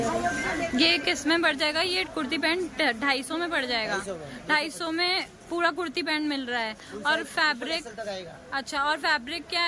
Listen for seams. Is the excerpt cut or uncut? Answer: uncut